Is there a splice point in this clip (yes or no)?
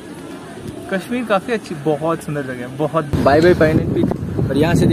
yes